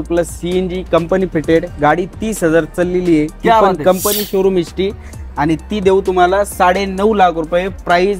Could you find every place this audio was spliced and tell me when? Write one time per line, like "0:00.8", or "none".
none